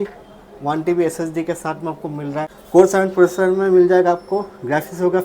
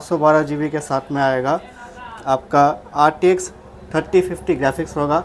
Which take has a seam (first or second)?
first